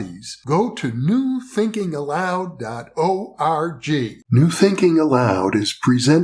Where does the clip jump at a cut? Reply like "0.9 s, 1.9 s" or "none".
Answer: 4.2 s